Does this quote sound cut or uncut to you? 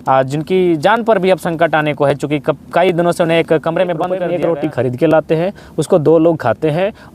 cut